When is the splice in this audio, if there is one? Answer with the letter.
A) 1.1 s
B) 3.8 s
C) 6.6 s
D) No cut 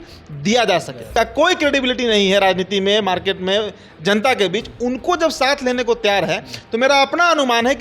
A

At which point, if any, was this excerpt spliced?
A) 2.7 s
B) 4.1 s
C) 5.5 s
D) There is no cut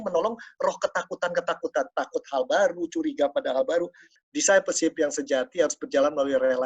B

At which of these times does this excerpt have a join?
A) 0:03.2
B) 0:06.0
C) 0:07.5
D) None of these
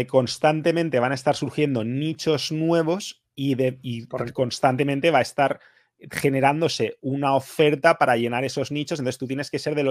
D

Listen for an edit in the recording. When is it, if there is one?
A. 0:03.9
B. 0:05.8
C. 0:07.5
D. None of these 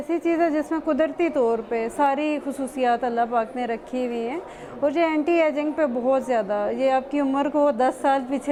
D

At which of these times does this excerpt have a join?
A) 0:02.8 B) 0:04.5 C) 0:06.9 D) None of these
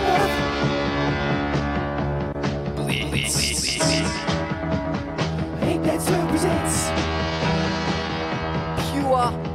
D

